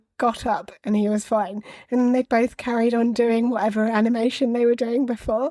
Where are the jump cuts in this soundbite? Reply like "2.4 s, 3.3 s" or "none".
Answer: none